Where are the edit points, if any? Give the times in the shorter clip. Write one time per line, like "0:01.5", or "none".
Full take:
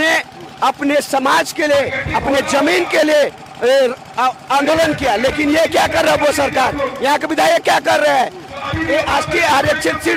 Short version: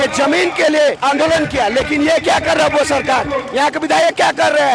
0:01.0